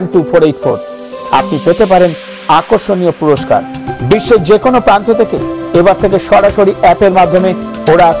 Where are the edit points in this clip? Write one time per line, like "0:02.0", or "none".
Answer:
0:03.8

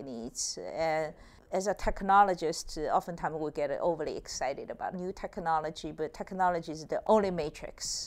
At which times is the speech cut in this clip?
0:01.4
0:04.9
0:07.0

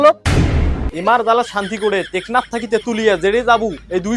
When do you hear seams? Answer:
0:00.9

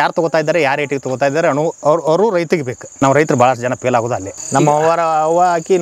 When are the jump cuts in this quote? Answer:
0:02.8
0:04.3

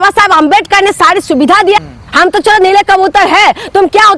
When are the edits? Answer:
0:01.8

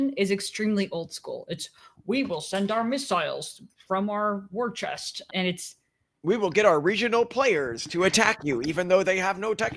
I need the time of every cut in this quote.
none

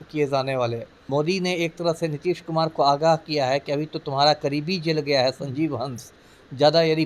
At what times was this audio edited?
0:00.9

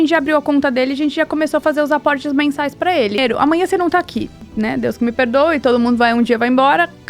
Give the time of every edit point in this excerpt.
0:03.2
0:04.4

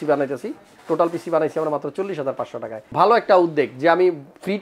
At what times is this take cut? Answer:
0:02.9

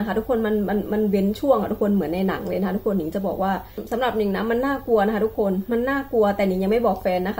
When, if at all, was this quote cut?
0:03.8

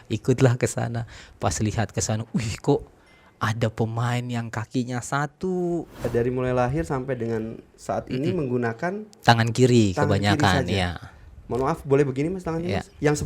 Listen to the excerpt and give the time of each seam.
0:05.9

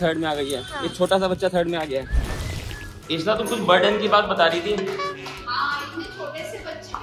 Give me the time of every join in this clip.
none

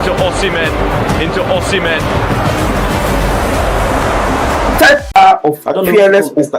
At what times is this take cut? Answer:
0:05.2

